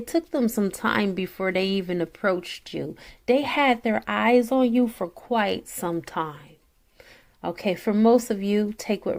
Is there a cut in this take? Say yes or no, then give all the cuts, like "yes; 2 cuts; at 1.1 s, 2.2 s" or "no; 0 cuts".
no; 0 cuts